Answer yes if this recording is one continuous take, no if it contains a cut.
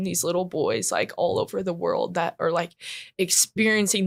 yes